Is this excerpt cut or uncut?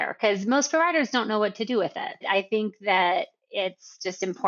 uncut